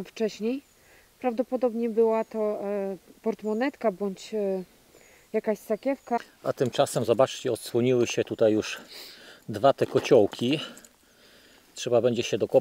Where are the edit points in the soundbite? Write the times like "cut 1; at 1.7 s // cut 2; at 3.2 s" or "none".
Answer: cut 1; at 6.2 s